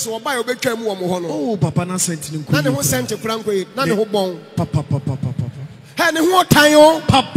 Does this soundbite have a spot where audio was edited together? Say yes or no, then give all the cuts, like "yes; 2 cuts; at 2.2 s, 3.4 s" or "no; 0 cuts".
no; 0 cuts